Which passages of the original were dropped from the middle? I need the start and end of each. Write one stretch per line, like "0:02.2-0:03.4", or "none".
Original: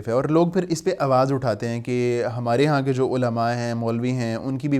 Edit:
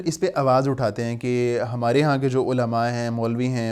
none